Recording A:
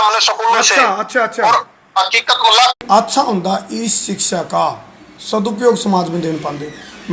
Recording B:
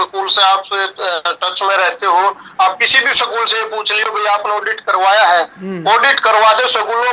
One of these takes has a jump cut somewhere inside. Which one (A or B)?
A